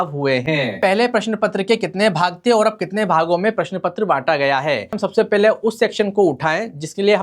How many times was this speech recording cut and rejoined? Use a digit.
2